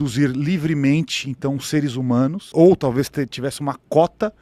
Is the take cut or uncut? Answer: cut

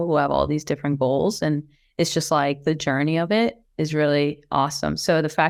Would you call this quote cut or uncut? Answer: uncut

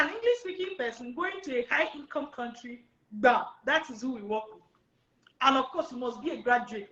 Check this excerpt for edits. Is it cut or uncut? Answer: uncut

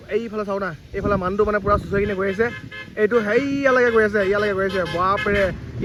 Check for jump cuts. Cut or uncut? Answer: uncut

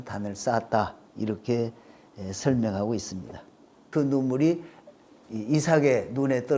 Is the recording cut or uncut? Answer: cut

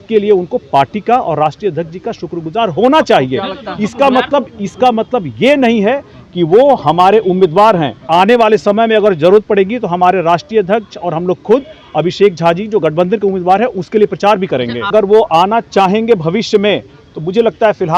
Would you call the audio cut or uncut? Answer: cut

